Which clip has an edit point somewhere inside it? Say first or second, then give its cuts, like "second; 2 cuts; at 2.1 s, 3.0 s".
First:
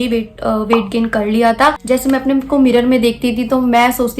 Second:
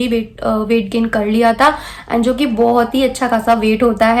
first; 1 cut; at 1.8 s